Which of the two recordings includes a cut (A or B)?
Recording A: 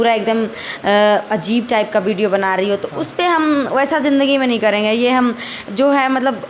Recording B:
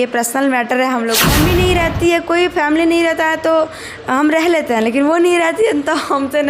B